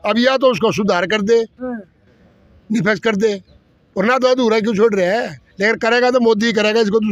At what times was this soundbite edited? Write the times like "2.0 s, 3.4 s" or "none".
none

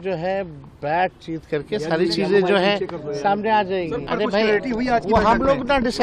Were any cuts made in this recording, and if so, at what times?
4.0 s

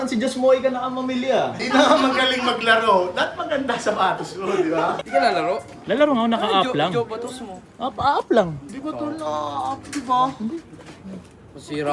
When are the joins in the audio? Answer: 1.6 s, 5.0 s

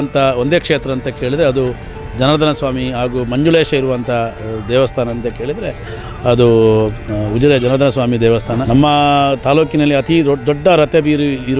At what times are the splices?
8.6 s

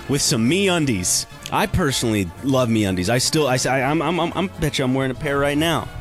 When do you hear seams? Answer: 1.3 s

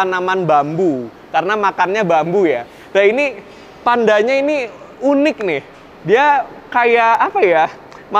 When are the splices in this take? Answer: none

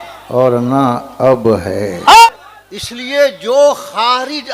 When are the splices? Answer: 2.3 s

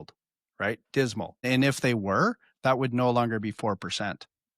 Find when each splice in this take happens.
1.4 s

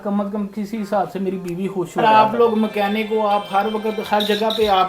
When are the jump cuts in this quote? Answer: 1.9 s

